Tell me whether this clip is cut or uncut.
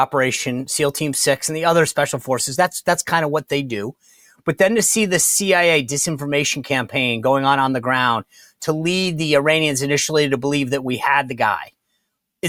uncut